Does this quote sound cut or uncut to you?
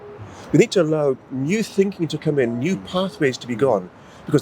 uncut